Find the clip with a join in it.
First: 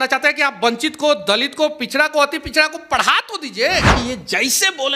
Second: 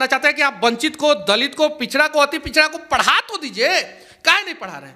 first; 1 cut; at 3.9 s

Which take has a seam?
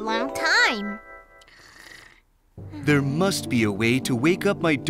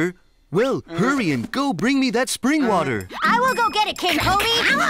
second; 1 cut; at 3.1 s

